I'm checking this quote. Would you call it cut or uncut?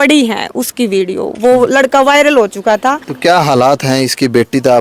cut